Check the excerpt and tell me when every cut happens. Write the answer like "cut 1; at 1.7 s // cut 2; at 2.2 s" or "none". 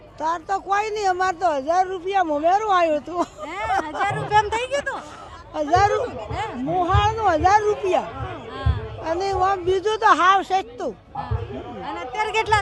none